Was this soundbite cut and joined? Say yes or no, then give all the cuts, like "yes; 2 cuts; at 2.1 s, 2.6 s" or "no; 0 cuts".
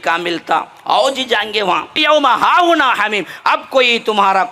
yes; 1 cut; at 2.0 s